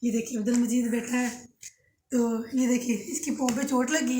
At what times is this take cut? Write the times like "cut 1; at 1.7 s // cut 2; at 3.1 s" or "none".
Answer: none